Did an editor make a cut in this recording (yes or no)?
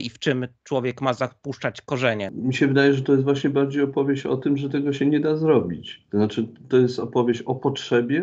yes